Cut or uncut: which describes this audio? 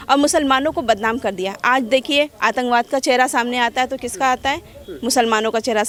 uncut